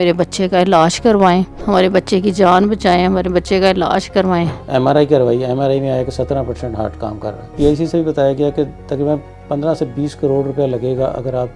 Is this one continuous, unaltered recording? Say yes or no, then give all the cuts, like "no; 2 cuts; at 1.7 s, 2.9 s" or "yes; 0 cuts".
no; 3 cuts; at 1.6 s, 4.6 s, 7.5 s